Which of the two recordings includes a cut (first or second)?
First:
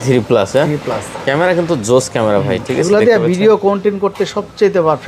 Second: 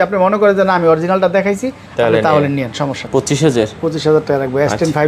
second